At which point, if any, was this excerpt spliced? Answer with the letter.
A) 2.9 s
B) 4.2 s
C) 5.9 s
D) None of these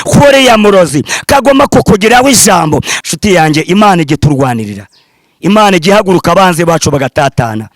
A